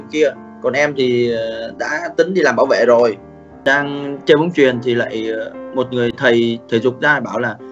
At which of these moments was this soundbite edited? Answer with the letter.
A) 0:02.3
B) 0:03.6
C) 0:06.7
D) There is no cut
B